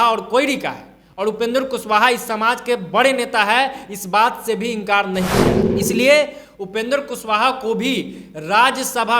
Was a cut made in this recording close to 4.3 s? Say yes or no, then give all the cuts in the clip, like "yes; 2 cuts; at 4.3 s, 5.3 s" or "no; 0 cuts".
no; 1 cut; at 5.7 s